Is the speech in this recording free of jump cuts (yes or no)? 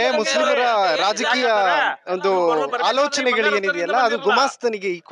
yes